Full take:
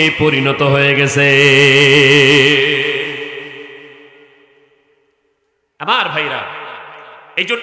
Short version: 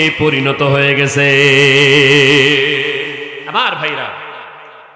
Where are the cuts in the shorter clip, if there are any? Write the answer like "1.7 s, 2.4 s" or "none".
3.4 s